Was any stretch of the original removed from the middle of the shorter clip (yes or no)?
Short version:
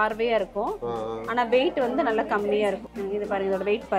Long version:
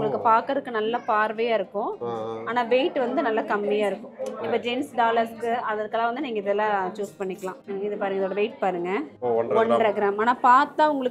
yes